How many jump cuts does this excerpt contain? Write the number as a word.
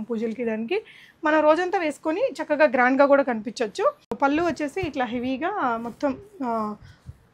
one